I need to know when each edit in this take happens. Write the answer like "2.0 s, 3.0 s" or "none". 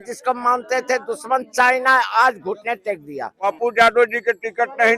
3.4 s